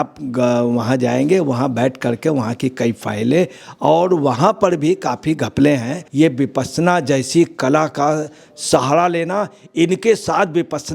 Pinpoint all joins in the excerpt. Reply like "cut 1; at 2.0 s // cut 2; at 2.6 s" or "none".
cut 1; at 6.0 s